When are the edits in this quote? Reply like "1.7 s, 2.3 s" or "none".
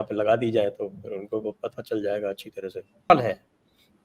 3.1 s